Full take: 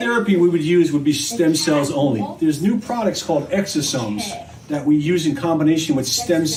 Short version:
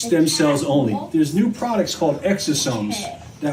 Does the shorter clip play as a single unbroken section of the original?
yes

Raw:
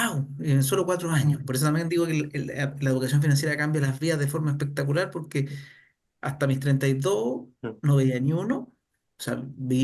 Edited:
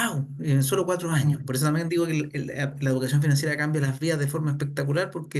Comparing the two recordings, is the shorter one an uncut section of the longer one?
yes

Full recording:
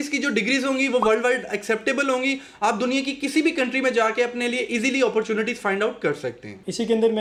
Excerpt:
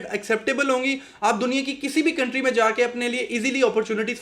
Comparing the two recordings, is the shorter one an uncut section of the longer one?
yes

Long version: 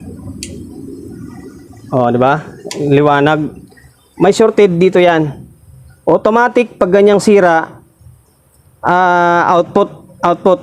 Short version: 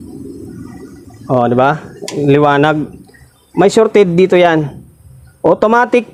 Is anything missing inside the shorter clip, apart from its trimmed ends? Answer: no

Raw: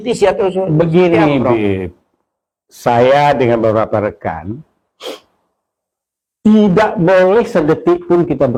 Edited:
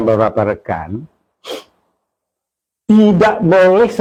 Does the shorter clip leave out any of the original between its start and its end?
no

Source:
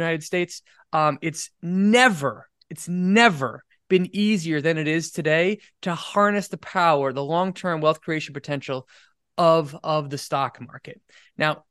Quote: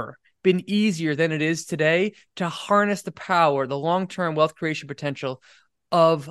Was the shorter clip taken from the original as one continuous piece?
yes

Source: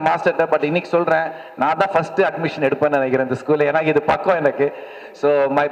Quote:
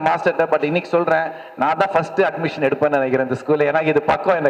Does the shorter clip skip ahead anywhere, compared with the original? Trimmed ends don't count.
no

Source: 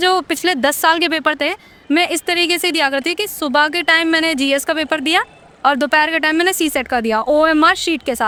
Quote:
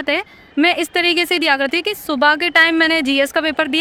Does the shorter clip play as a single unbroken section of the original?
yes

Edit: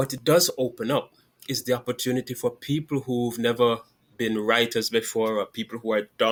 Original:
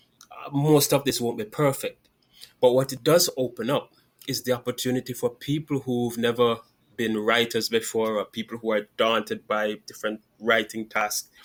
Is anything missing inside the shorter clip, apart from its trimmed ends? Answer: no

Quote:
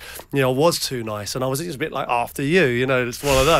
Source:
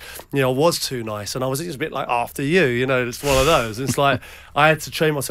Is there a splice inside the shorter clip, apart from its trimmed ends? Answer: no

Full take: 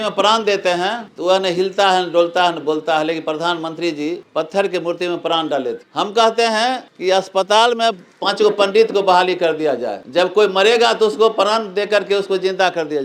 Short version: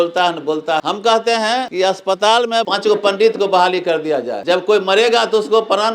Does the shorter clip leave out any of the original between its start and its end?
yes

